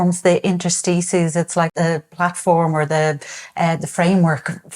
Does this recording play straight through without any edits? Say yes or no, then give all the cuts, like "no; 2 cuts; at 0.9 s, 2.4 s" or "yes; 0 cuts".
no; 1 cut; at 1.7 s